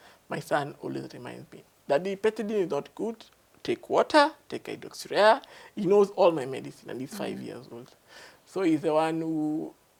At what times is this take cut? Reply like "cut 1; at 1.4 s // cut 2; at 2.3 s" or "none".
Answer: none